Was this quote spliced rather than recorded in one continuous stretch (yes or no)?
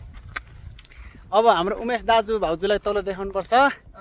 no